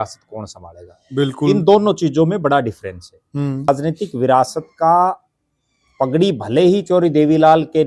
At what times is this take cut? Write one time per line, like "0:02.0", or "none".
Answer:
0:03.7